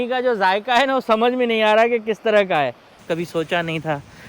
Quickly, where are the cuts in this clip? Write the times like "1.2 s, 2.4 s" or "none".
3.0 s